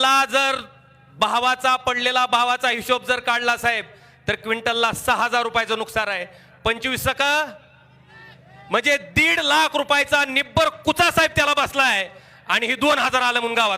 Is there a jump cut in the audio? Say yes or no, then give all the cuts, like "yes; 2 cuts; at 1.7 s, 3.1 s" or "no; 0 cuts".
no; 0 cuts